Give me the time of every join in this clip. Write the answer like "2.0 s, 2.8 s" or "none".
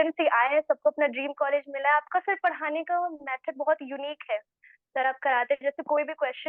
none